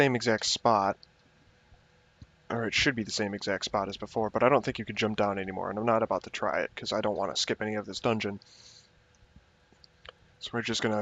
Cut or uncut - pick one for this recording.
uncut